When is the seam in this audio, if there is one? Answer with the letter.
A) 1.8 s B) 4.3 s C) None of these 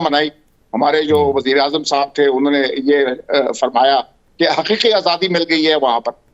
C